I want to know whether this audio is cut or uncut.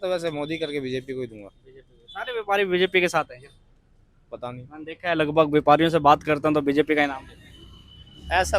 uncut